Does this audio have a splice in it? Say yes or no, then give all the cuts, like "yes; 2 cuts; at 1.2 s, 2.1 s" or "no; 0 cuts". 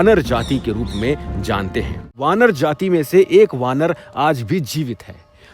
yes; 1 cut; at 2.1 s